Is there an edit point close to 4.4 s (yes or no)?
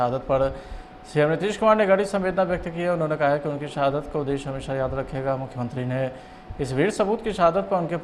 no